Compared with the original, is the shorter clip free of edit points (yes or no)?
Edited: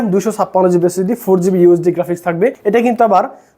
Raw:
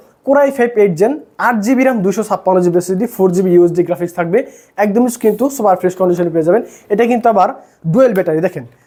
no